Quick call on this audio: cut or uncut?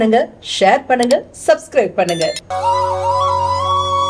uncut